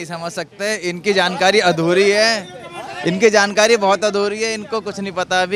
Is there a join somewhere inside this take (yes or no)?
no